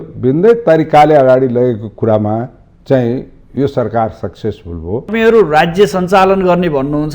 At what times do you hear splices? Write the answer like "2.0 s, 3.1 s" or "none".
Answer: 5.1 s